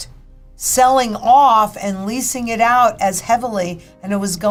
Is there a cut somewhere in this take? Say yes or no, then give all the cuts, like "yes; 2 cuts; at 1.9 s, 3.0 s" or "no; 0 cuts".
no; 0 cuts